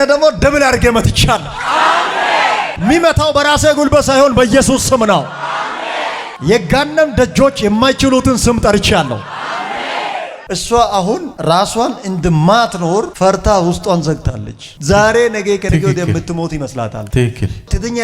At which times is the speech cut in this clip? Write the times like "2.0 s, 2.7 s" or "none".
10.5 s